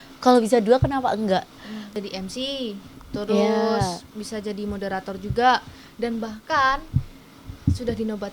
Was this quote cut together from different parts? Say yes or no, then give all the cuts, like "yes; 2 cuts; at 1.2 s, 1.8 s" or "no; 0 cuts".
yes; 1 cut; at 2.0 s